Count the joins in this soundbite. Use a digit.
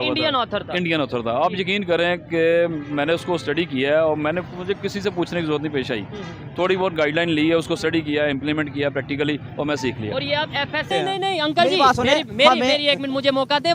1